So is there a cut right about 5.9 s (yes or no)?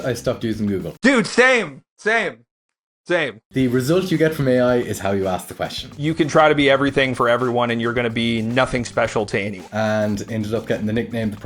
yes